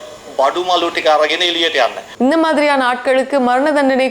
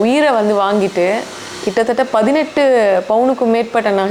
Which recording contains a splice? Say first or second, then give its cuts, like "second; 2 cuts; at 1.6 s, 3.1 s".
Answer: first; 1 cut; at 2.0 s